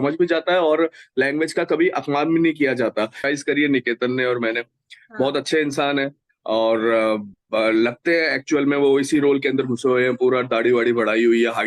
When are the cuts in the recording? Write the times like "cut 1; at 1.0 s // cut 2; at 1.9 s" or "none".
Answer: cut 1; at 3.2 s